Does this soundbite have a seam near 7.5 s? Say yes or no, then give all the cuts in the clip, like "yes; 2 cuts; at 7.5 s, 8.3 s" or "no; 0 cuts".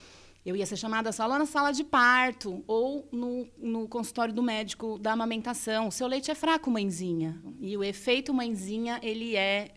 yes; 1 cut; at 7.5 s